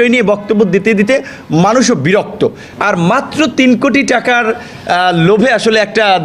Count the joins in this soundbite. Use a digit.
1